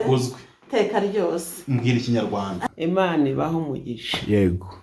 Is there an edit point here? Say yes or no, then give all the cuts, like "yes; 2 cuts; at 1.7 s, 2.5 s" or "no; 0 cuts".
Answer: yes; 1 cut; at 2.7 s